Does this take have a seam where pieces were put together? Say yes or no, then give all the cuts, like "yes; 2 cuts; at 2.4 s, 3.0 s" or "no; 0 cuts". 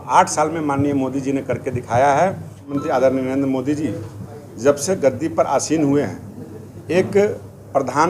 yes; 1 cut; at 2.7 s